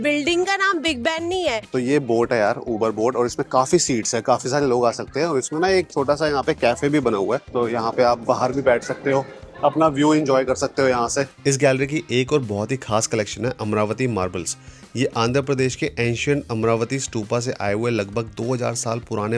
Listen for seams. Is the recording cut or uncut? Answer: cut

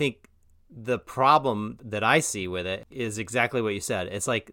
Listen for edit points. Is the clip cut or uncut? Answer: cut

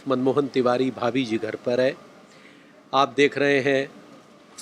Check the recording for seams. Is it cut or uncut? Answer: uncut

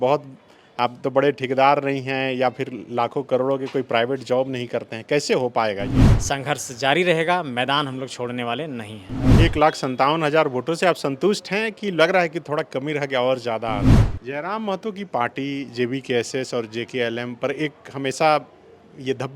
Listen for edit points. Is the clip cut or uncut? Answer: cut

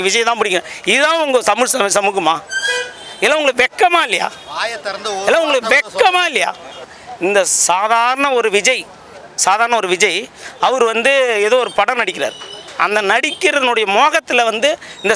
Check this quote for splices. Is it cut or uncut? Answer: cut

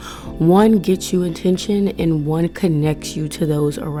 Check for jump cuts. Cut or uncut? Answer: uncut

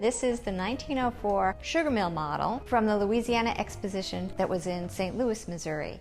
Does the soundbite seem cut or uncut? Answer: cut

